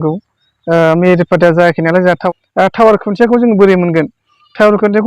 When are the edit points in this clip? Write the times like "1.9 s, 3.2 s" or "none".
2.2 s

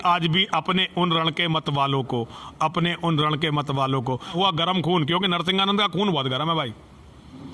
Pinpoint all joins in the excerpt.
4.3 s

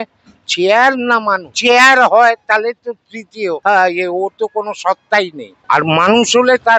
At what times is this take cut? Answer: 1.5 s, 3.6 s, 5.5 s

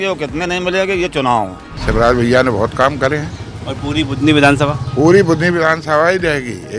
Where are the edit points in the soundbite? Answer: 1.7 s

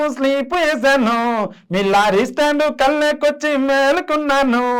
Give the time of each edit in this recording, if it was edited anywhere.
none

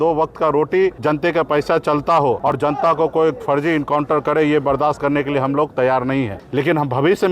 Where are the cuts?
1.0 s, 2.4 s, 6.4 s

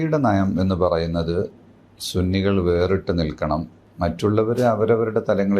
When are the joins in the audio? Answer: 3.8 s

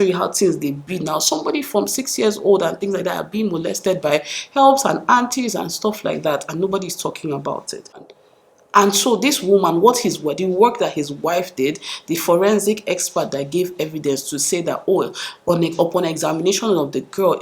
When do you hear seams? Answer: 8.1 s

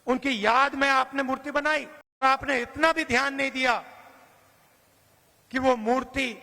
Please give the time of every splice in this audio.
2.2 s

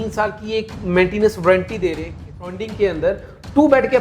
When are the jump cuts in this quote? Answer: 2.3 s

